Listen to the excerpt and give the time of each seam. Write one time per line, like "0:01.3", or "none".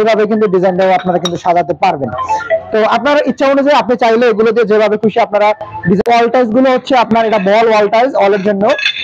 0:06.0

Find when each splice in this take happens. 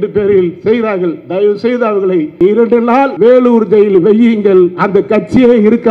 0:02.3
0:03.1

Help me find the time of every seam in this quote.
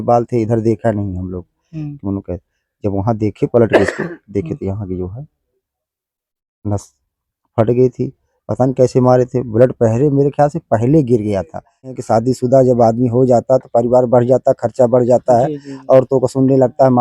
0:12.0

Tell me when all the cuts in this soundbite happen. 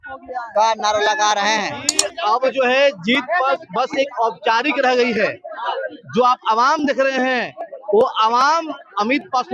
0:02.1

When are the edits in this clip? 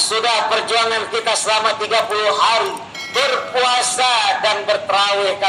none

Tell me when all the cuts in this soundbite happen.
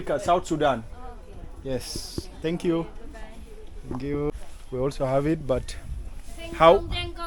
0:04.3

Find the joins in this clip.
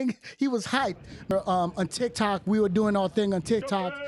0:01.3

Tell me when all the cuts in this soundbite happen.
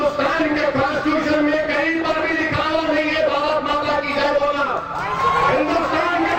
none

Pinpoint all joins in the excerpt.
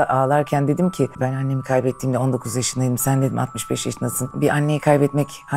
0:01.1
0:04.3

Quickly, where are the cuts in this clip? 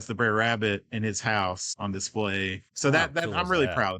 0:01.7
0:02.6

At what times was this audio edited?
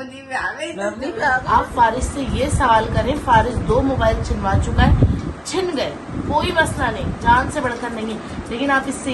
0:01.4

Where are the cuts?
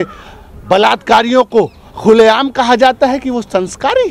none

